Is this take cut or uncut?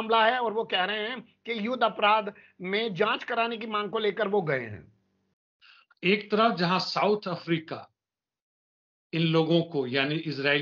uncut